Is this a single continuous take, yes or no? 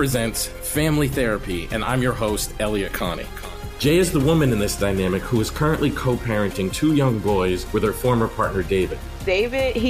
yes